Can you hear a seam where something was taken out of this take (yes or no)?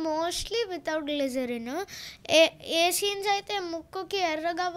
no